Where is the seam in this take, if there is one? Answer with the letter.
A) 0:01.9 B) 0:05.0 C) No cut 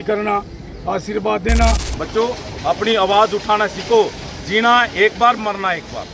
A